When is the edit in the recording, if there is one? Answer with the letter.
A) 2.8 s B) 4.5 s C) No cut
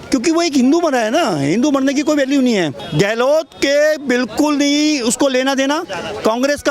A